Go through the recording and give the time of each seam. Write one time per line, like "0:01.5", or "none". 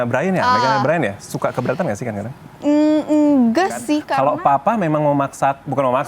0:04.1